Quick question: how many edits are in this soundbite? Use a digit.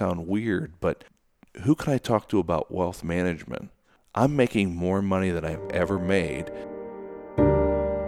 1